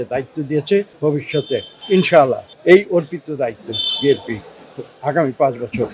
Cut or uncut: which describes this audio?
cut